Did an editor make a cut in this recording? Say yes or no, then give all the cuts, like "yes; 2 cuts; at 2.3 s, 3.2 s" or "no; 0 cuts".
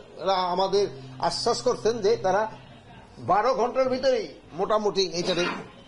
no; 0 cuts